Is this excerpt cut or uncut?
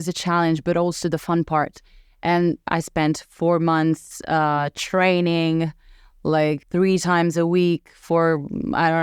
cut